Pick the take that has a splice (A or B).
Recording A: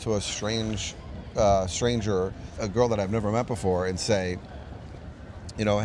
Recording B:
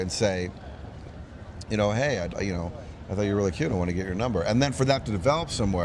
A